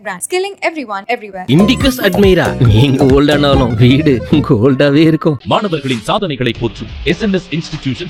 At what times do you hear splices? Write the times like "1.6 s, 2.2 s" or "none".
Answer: none